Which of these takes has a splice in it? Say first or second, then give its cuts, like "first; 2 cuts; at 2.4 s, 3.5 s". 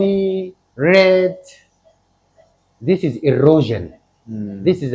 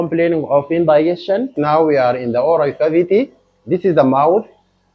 second; 1 cut; at 1.5 s